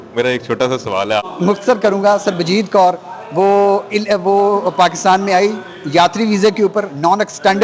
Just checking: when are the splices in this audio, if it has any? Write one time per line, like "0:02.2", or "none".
0:01.3